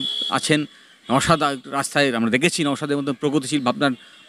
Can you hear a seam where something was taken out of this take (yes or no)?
no